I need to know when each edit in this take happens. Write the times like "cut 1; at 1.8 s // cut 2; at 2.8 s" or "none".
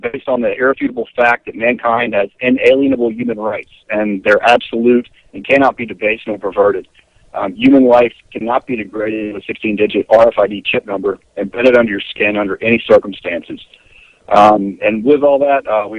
none